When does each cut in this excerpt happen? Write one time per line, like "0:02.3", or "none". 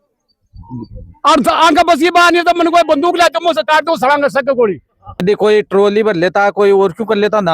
0:05.2